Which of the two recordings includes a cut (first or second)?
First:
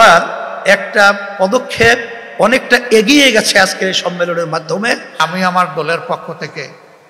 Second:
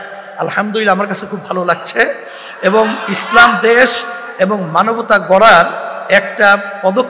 first